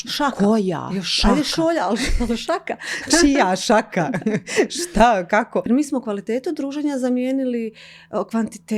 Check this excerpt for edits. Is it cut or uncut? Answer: cut